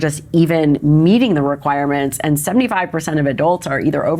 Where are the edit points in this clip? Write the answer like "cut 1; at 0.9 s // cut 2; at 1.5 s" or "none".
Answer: none